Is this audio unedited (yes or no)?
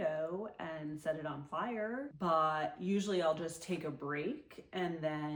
yes